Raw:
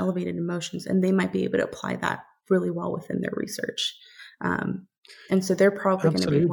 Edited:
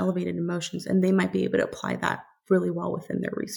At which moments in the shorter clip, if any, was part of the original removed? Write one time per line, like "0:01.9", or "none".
none